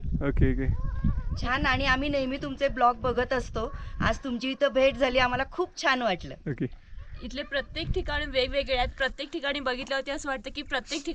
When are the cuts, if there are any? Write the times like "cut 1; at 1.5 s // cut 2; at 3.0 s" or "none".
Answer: none